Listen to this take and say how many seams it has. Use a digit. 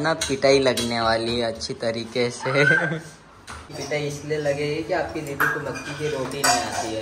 1